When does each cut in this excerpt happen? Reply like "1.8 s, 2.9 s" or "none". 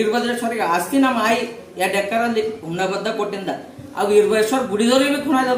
none